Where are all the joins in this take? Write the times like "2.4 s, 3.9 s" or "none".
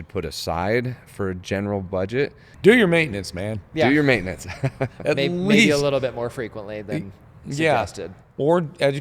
2.4 s